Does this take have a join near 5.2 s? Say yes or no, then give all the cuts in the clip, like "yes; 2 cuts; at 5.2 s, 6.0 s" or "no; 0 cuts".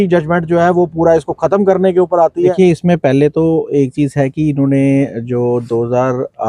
no; 1 cut; at 2.5 s